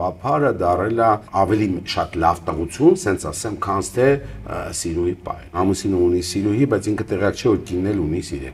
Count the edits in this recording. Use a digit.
2